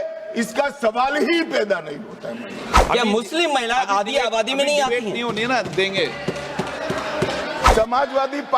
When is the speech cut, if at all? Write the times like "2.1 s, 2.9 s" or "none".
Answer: 2.7 s, 7.7 s